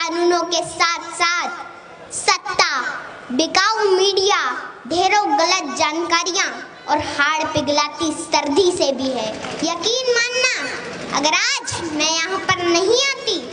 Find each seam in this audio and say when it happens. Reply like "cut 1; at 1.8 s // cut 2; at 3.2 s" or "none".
cut 1; at 9.5 s